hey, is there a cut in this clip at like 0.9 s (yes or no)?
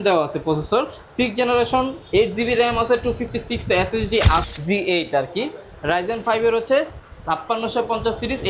no